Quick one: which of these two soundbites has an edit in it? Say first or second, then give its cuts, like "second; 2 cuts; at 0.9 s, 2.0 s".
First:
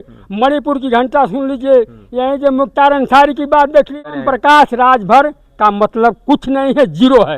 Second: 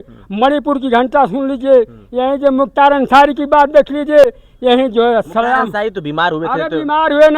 first; 1 cut; at 4.0 s